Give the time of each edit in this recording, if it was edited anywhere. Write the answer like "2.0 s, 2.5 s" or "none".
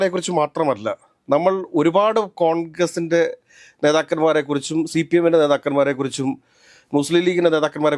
none